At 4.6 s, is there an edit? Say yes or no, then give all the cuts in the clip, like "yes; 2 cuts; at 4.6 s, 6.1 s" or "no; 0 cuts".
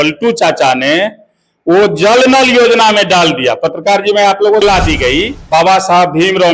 yes; 1 cut; at 4.6 s